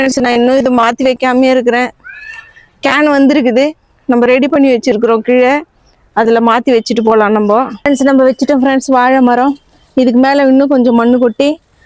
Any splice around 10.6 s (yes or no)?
no